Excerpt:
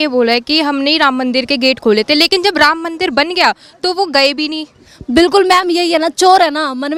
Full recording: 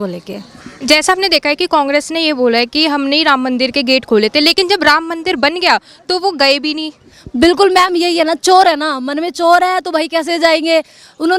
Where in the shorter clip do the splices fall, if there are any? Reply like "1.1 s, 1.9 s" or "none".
none

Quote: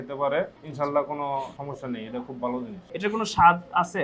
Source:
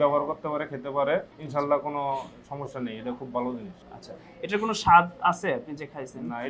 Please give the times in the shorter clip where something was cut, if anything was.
1.6 s, 2.8 s

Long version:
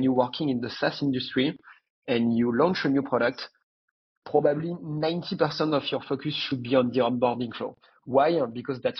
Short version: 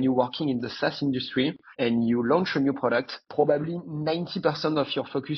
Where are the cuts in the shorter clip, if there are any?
1.6 s, 3.2 s

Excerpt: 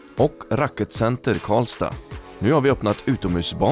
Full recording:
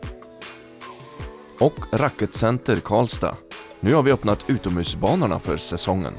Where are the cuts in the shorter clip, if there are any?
none

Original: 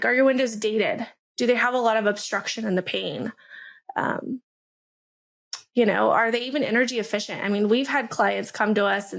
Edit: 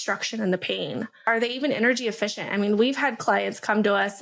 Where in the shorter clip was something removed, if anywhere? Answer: 1.3 s

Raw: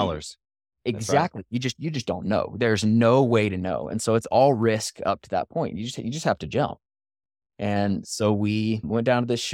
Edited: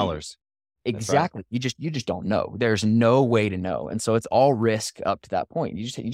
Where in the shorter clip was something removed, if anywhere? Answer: none

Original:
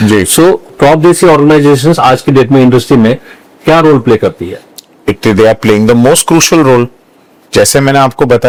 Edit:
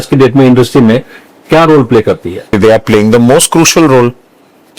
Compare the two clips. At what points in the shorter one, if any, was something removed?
2.5 s

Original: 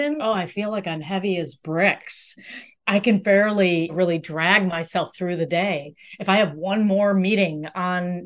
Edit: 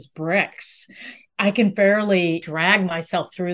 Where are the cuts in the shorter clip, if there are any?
2.4 s

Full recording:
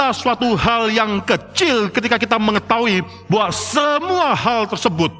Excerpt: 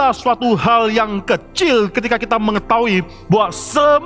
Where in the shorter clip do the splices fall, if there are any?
none

